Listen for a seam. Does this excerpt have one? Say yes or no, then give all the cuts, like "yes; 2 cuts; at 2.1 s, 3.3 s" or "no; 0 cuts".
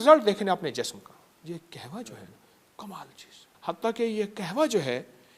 yes; 2 cuts; at 1.4 s, 3.5 s